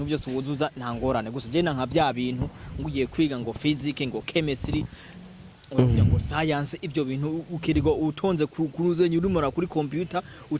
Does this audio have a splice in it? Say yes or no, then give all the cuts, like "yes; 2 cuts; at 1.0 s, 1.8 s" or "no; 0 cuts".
no; 0 cuts